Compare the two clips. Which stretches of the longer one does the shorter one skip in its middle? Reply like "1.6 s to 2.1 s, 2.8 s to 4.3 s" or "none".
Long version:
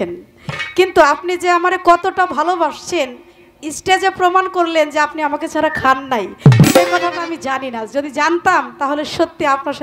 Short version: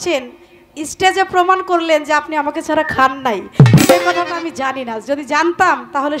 none